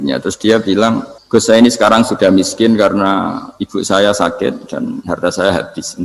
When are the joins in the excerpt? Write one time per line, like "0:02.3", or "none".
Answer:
0:01.1